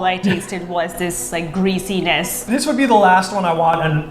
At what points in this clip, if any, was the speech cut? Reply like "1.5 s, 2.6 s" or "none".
2.4 s